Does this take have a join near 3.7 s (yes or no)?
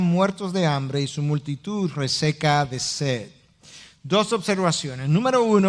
no